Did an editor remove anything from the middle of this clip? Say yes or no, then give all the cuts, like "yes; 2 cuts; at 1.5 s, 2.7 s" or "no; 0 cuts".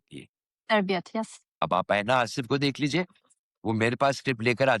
yes; 1 cut; at 1.5 s